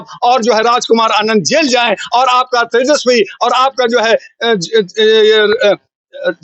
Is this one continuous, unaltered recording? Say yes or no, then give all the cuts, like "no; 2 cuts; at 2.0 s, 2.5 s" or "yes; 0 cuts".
yes; 0 cuts